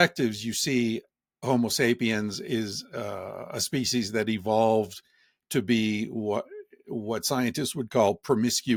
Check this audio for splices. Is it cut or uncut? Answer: uncut